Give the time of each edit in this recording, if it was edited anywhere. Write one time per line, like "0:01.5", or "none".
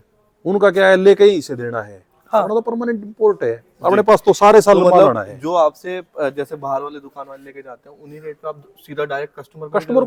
none